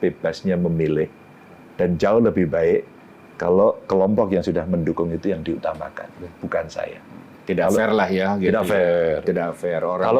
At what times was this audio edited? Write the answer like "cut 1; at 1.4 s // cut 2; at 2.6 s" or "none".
none